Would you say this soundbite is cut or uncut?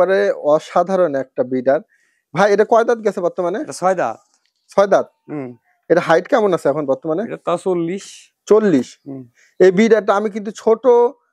uncut